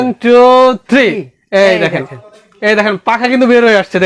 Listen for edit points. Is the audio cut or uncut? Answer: uncut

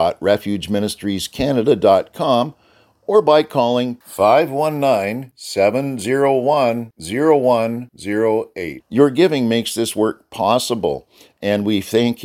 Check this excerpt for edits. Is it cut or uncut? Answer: uncut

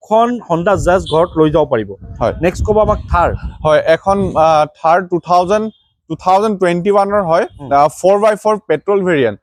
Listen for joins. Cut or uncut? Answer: uncut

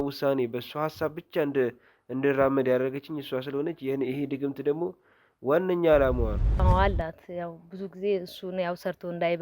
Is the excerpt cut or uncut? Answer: cut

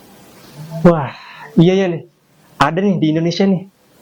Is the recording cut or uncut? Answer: uncut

